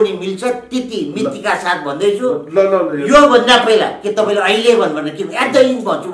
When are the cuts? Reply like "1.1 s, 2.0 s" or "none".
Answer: none

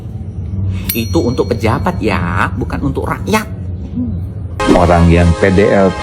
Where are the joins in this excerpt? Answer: 4.6 s

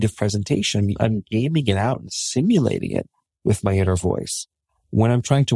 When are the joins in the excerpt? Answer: 0.9 s

